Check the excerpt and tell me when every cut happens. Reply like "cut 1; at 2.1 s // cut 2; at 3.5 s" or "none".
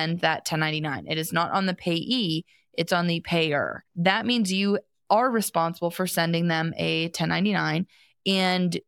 cut 1; at 3.9 s